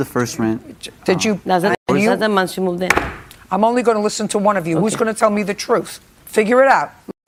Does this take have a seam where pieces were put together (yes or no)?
no